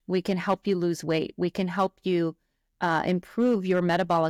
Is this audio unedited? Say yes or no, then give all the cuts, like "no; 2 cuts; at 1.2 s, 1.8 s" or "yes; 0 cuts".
yes; 0 cuts